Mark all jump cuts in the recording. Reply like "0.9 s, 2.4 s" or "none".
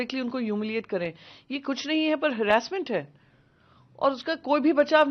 none